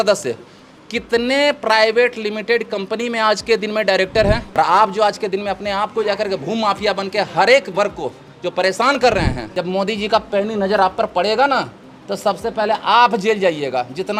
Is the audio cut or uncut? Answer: cut